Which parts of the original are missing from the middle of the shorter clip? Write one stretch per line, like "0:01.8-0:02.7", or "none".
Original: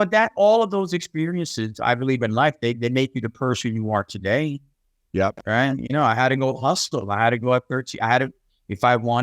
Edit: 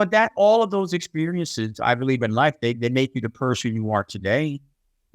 none